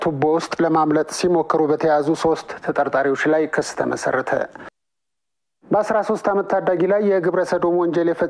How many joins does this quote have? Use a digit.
1